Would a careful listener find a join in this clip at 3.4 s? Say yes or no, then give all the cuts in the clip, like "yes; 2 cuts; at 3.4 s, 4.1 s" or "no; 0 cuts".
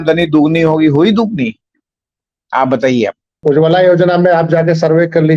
yes; 1 cut; at 3.4 s